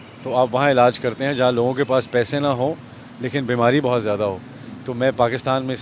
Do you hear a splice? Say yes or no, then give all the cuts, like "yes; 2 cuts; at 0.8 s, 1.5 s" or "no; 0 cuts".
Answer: no; 0 cuts